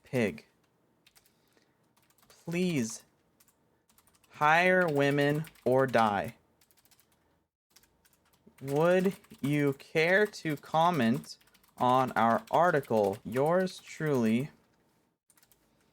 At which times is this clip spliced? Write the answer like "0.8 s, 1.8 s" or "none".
13.2 s

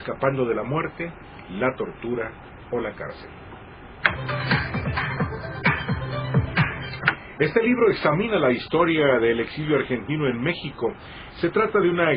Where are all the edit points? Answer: 9.4 s

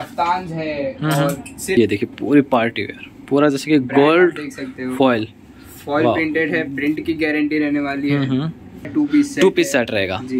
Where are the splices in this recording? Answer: 1.8 s, 8.9 s

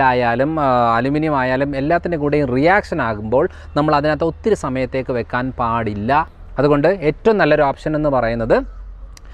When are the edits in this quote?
6.3 s

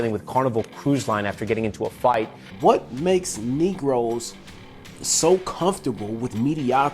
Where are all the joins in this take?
2.4 s

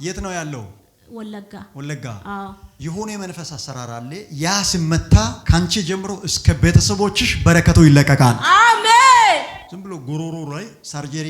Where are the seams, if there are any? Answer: 9.7 s

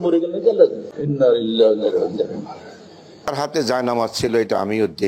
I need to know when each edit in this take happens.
1.0 s, 3.3 s

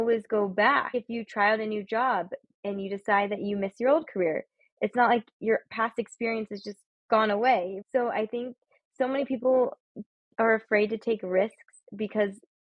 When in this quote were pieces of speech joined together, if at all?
0.9 s, 7.8 s

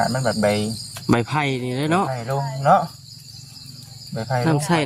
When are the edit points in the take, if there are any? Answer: none

